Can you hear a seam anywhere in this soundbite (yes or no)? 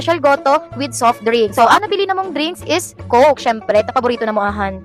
no